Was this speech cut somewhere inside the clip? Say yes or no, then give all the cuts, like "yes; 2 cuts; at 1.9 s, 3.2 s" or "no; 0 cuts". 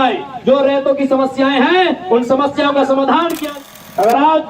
yes; 1 cut; at 3.4 s